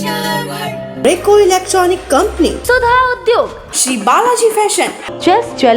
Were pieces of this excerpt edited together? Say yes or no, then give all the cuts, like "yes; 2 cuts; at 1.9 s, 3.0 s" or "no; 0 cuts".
yes; 1 cut; at 0.9 s